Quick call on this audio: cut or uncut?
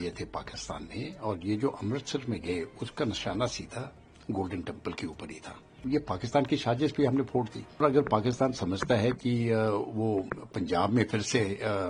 cut